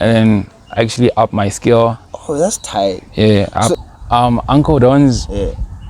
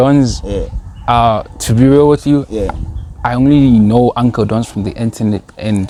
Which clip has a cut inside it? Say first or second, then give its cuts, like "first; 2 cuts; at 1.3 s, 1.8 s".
first; 1 cut; at 3.8 s